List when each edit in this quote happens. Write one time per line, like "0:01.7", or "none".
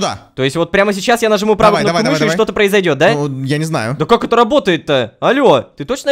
0:03.8